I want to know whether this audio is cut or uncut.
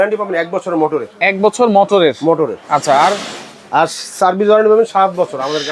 uncut